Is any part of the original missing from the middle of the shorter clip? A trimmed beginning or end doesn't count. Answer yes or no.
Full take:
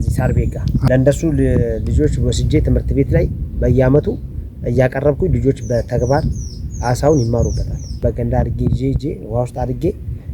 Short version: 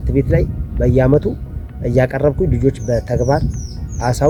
no